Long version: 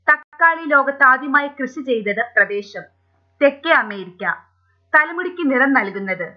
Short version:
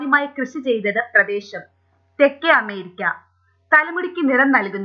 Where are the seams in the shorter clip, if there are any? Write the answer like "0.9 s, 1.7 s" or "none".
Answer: none